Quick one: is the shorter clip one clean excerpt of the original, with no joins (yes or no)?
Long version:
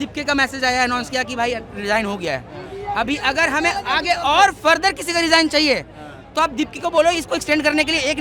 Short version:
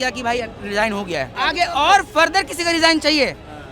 no